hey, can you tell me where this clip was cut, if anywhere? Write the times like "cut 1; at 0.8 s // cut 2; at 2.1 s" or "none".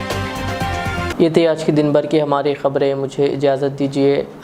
none